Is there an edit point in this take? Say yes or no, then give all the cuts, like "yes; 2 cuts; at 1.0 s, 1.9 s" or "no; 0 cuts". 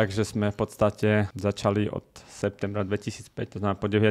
yes; 1 cut; at 1.3 s